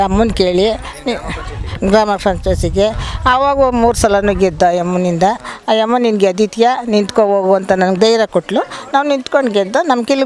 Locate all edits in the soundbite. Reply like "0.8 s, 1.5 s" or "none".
none